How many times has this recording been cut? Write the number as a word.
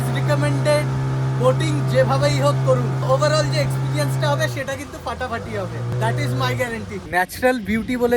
three